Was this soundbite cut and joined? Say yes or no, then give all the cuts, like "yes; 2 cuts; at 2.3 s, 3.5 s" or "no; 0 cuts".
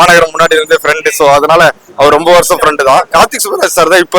yes; 1 cut; at 3.1 s